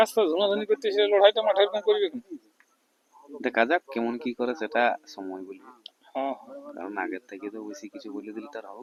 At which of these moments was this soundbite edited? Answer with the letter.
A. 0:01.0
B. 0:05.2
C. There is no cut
C